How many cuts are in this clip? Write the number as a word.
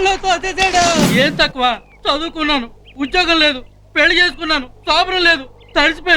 one